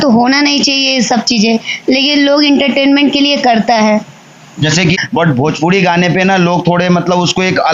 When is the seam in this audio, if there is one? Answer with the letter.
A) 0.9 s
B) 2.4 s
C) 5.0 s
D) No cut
C